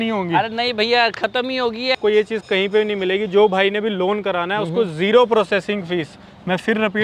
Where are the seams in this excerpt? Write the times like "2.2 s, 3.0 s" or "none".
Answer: 2.0 s